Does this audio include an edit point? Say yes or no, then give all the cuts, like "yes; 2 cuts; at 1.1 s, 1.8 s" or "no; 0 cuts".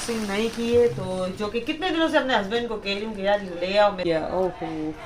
yes; 1 cut; at 4.0 s